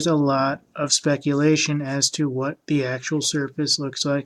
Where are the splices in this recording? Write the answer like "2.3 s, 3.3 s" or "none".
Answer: 2.8 s